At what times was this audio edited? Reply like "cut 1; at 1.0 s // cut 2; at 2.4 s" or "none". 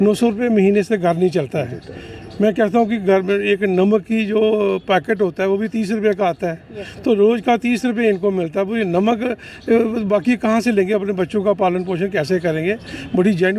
none